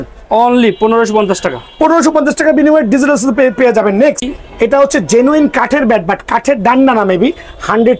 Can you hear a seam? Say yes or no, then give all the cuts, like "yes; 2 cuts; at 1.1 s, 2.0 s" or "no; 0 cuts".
yes; 1 cut; at 4.3 s